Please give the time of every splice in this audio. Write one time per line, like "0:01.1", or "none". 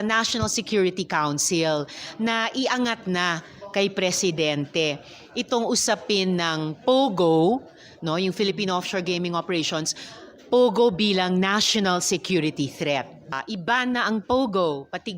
0:13.4

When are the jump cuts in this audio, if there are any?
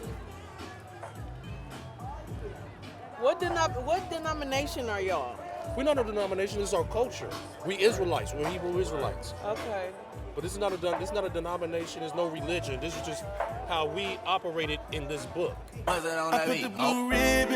0:15.7

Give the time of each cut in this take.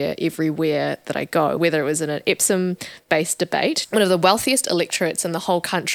0:01.6
0:03.8

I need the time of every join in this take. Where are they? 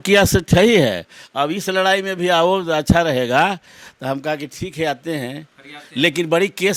none

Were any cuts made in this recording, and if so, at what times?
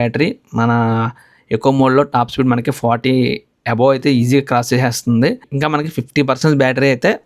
0:05.5

